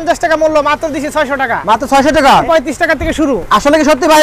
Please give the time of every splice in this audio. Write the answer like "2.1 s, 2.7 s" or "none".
2.4 s